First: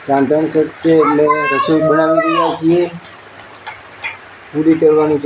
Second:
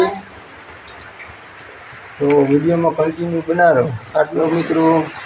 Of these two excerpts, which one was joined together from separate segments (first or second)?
second